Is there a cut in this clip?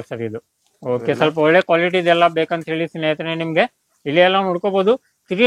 no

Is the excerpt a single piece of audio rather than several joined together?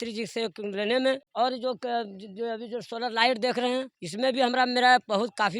no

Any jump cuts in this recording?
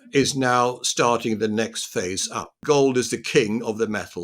yes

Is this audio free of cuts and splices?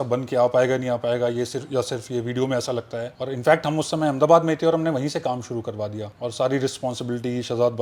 yes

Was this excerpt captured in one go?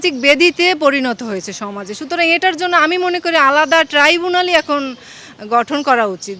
yes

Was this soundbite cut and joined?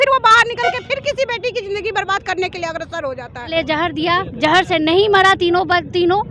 yes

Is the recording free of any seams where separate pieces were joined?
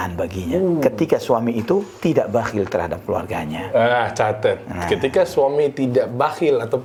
yes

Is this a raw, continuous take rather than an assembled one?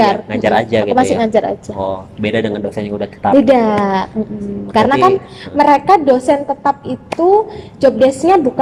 yes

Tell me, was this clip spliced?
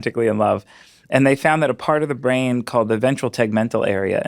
no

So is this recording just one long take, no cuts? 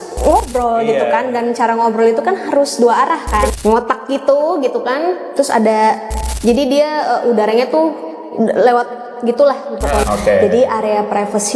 no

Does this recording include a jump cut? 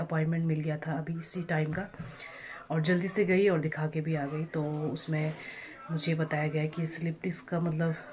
no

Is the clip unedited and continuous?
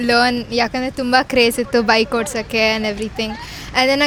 yes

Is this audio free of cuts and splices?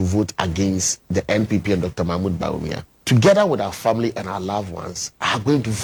yes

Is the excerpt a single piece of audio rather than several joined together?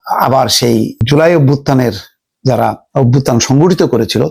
no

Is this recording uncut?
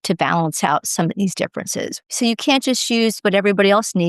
no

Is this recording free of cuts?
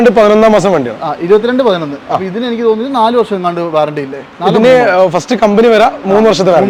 yes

